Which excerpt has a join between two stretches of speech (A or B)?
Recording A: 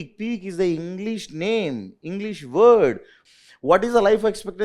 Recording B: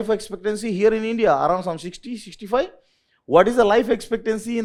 A